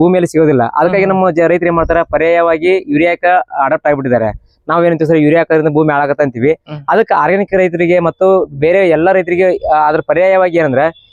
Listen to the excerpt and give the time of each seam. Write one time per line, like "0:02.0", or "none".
none